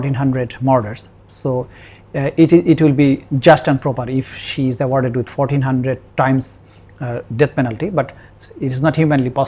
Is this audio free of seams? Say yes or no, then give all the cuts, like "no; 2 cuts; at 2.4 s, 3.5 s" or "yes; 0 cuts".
yes; 0 cuts